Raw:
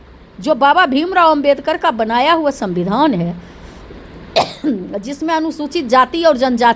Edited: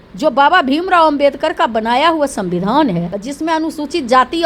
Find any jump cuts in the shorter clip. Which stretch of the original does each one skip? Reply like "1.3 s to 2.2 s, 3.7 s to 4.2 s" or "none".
3.4 s to 5.0 s